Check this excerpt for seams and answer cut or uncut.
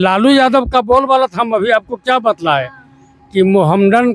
uncut